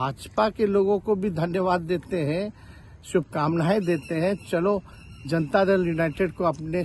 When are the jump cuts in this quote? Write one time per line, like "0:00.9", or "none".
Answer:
none